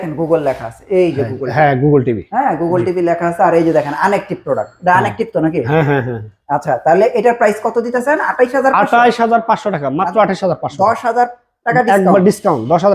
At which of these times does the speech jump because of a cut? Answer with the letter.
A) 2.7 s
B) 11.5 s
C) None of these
C